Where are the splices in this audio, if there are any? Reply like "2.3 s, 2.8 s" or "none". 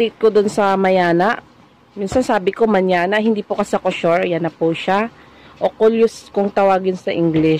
none